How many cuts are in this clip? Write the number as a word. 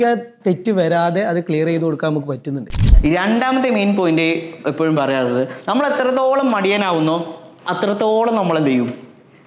one